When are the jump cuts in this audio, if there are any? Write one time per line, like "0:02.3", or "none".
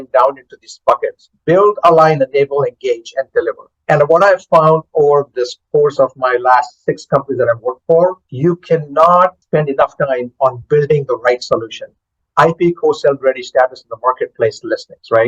0:03.7
0:08.3
0:09.4